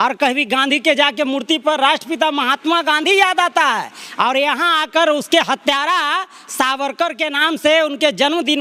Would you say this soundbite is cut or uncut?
uncut